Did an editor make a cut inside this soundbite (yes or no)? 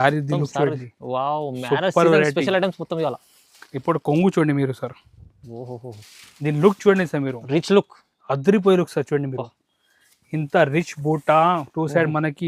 no